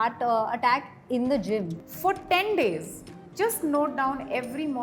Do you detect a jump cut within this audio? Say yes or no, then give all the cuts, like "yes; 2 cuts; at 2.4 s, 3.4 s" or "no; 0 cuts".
yes; 1 cut; at 1.8 s